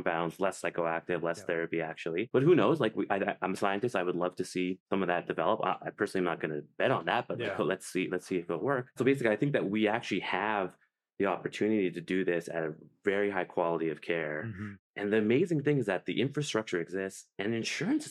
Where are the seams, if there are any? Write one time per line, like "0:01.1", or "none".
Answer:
none